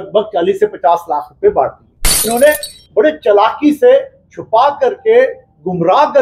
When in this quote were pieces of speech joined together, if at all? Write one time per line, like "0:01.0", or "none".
0:02.3